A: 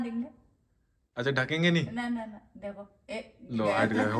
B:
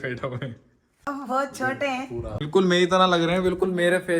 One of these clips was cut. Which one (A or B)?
B